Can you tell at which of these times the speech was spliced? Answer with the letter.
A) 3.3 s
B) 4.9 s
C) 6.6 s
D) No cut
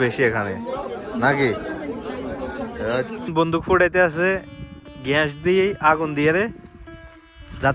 A